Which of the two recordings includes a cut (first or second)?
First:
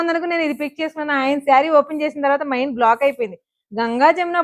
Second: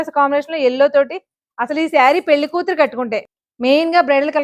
second